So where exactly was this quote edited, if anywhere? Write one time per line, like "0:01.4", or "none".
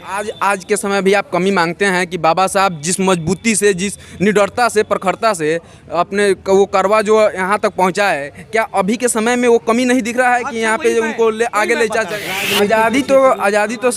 0:12.4